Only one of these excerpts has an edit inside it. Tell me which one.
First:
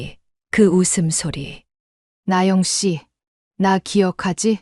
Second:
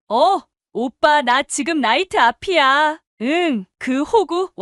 first; 1 cut; at 2.1 s

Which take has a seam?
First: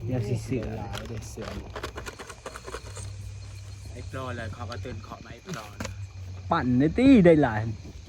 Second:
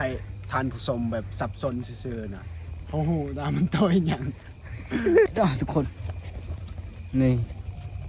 second; 1 cut; at 5.3 s

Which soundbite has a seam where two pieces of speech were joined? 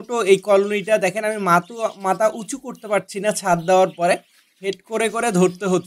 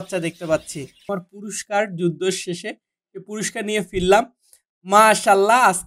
second; 1 cut; at 1.2 s

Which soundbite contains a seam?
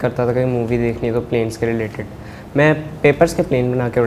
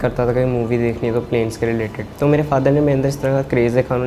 second; 1 cut; at 2.0 s

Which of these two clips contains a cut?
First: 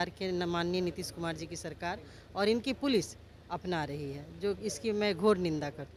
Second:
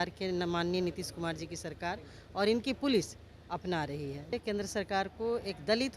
second; 1 cut; at 4.3 s

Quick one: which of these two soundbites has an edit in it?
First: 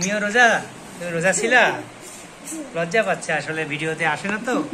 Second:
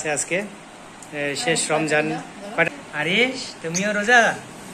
second; 1 cut; at 2.7 s

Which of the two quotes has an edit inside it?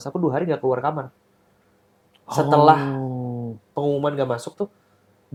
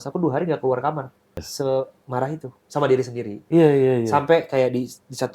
second; 1 cut; at 1.5 s

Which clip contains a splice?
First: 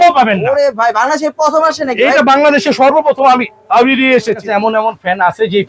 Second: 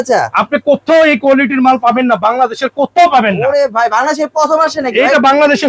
first; 1 cut; at 4.4 s

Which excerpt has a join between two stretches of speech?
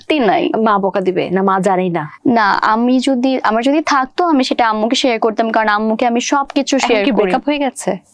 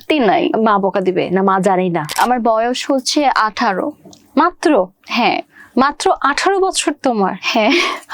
second; 1 cut; at 2.1 s

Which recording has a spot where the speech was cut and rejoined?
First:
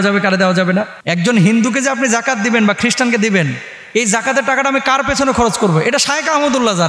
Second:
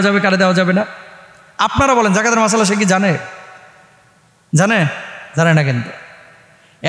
first; 1 cut; at 1.0 s

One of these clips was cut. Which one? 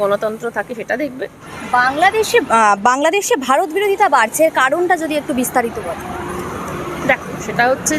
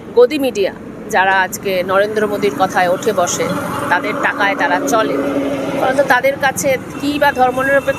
first; 1 cut; at 1.5 s

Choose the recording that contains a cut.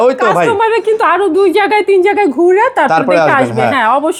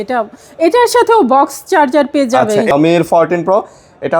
second; 1 cut; at 2.7 s

